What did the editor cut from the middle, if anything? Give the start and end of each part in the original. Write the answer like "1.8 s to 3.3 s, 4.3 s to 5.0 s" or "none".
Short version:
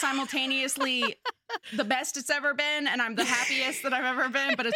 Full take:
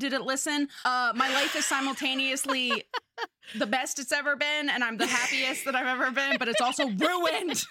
3.3 s to 3.4 s

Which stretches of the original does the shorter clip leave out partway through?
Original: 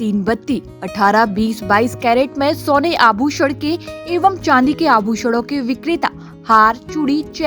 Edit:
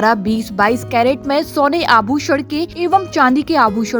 3.8 s to 4.0 s

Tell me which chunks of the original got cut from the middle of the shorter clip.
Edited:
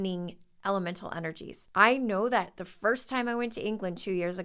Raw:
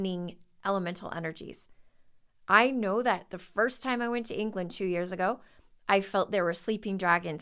1.5 s to 2.3 s

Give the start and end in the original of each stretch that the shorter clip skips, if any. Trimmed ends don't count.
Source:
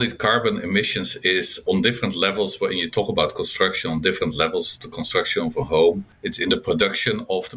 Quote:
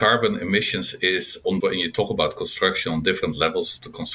1.8 s to 2.6 s

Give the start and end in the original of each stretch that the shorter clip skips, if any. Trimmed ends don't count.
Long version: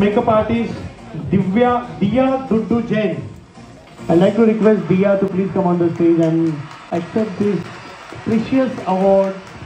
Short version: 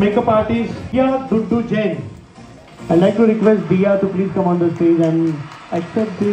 0.9 s to 2.1 s

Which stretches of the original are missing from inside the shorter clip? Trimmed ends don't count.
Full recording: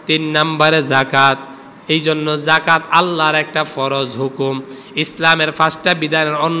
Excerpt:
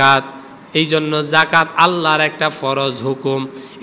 none

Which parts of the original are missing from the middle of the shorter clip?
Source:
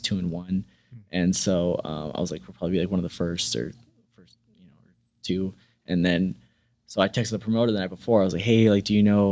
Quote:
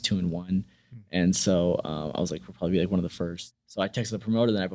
3.4 s to 6.6 s

